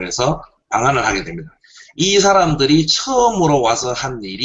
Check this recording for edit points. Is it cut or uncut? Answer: cut